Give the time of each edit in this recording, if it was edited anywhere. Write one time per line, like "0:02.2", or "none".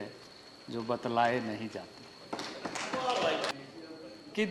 0:03.5